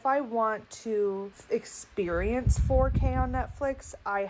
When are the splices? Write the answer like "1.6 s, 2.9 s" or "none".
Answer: 1.4 s